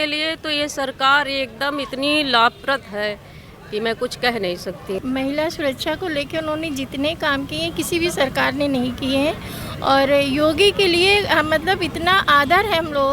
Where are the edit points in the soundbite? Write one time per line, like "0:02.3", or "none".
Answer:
0:05.0